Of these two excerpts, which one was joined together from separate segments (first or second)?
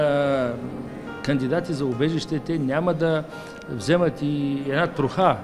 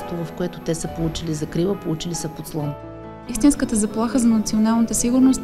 second